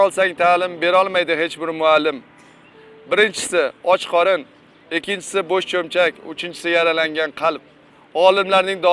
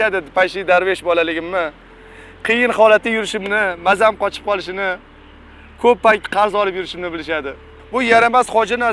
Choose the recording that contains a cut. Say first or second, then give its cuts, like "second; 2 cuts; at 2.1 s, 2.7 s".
second; 1 cut; at 7.6 s